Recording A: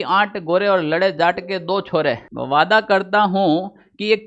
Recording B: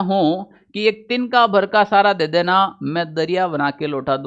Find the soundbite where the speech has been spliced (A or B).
A